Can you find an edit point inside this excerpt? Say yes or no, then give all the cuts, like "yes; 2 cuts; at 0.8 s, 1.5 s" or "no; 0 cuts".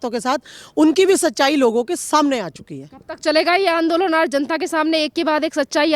no; 0 cuts